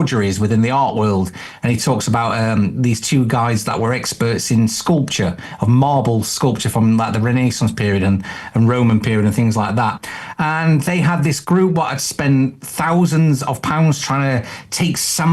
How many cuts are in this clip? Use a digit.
0